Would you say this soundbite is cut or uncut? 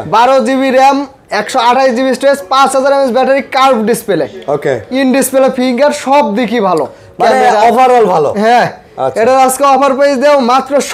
uncut